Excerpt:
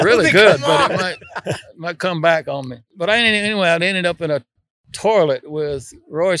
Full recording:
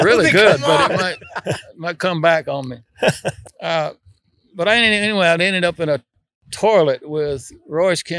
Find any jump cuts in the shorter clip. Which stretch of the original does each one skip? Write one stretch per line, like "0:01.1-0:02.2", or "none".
0:02.8-0:04.4